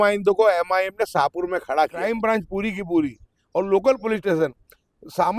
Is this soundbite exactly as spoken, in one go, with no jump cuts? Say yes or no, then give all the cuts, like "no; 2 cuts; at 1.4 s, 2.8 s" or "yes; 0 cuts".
no; 1 cut; at 2.1 s